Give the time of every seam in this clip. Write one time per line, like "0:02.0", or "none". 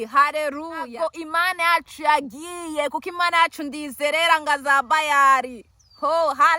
0:00.9